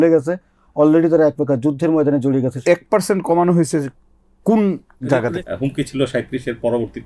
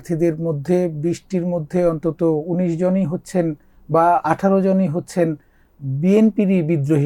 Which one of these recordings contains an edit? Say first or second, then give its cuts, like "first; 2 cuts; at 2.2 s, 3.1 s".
first; 2 cuts; at 2.6 s, 5.2 s